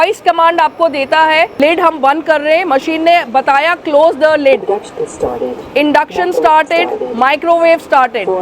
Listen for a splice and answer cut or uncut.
cut